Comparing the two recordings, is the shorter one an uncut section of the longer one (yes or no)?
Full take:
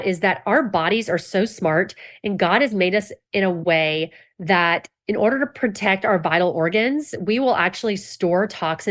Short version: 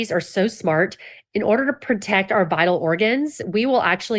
no